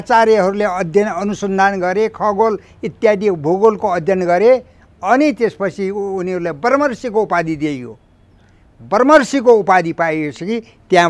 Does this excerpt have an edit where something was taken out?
no; 0 cuts

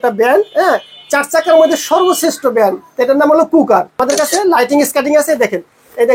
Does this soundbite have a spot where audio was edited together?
yes; 1 cut; at 4.0 s

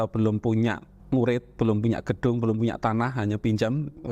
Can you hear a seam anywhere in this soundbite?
yes; 1 cut; at 0.9 s

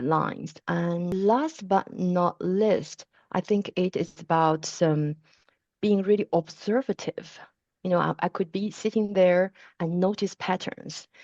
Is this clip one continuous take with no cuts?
no; 1 cut; at 0.9 s

